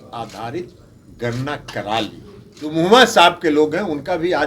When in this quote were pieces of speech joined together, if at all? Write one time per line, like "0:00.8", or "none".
0:02.6